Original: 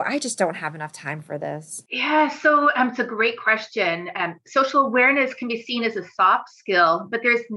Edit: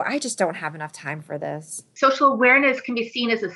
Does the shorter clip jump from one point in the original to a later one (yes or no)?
yes